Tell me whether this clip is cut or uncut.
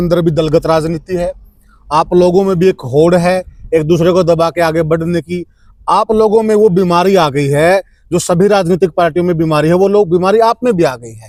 uncut